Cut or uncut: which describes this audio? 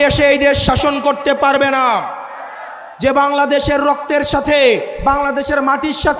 uncut